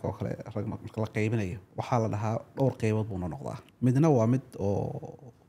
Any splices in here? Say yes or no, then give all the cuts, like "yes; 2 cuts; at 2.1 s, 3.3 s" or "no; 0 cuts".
yes; 2 cuts; at 1.6 s, 3.6 s